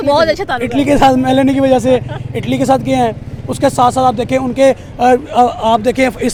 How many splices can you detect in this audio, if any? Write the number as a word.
zero